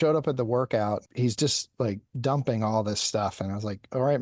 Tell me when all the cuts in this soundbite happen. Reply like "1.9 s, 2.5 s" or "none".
1.1 s, 3.4 s